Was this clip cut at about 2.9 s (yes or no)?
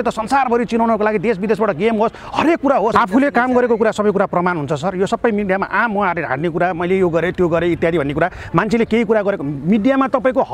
yes